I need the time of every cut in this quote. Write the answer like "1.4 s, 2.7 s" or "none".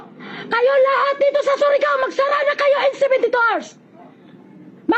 none